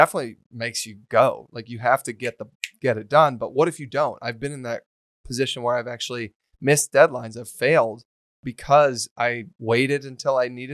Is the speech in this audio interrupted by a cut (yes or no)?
yes